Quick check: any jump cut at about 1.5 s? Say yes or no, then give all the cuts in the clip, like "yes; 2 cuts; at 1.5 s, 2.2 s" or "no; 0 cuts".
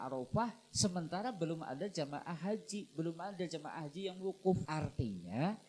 no; 1 cut; at 4.7 s